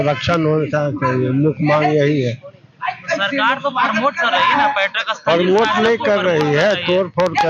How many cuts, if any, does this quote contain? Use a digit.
0